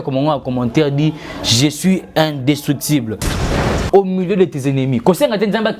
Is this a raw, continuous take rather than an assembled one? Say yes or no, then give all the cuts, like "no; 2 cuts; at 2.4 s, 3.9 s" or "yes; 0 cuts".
no; 1 cut; at 3.6 s